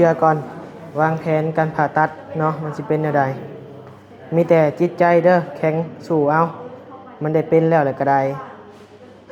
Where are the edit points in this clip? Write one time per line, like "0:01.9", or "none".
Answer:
none